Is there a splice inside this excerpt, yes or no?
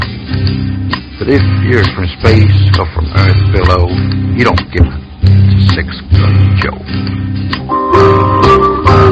yes